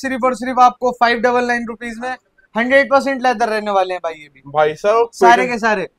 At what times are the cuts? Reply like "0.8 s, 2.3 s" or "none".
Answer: none